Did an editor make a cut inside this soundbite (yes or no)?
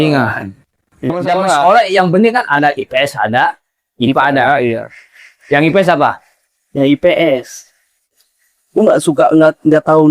yes